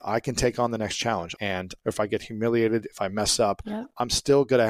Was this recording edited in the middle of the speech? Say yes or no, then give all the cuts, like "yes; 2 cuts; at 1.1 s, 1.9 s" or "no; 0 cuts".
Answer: yes; 1 cut; at 1.6 s